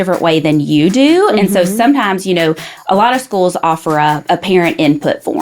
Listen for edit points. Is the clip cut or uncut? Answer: cut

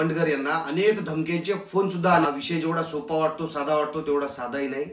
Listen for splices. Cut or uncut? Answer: cut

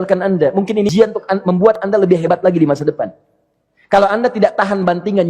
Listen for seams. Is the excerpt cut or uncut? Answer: cut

